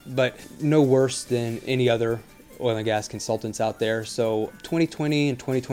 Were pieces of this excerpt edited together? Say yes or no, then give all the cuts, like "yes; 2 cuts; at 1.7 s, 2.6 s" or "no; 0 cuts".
no; 0 cuts